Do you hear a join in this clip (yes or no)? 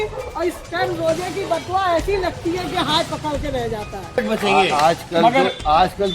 yes